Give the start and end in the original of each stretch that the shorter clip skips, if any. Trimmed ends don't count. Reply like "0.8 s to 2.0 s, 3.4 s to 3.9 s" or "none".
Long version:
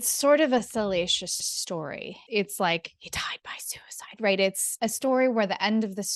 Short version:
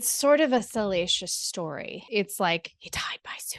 1.7 s to 1.9 s